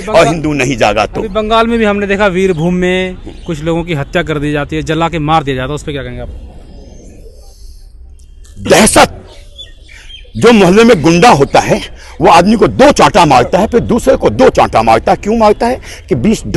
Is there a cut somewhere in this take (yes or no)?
no